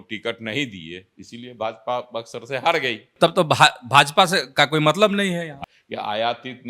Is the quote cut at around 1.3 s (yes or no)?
no